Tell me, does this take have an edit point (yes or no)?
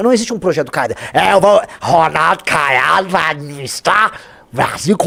no